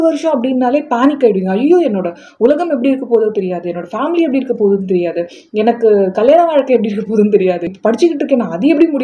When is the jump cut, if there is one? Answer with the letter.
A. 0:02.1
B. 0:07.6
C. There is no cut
B